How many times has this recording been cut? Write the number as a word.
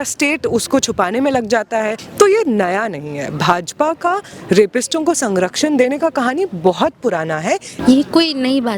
two